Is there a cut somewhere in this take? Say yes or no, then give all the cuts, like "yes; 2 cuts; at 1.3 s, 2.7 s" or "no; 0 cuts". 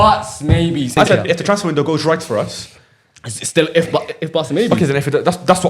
yes; 1 cut; at 1.0 s